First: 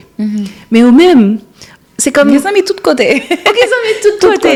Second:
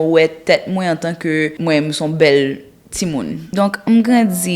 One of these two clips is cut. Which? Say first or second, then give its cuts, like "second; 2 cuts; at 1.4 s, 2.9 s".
second; 2 cuts; at 1.6 s, 3.8 s